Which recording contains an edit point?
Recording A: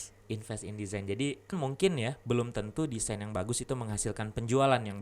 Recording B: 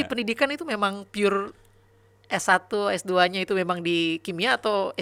A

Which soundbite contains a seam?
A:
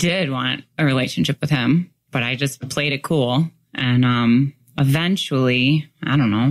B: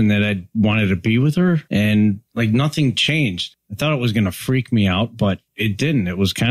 B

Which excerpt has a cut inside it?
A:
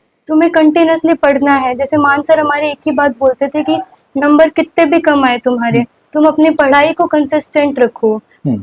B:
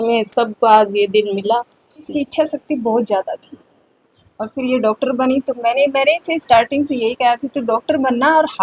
B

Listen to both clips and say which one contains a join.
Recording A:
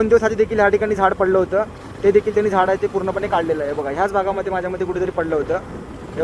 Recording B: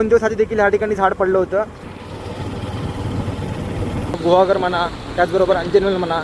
B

